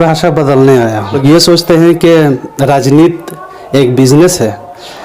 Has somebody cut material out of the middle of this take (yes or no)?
yes